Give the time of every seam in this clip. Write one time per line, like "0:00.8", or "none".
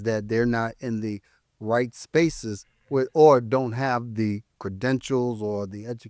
none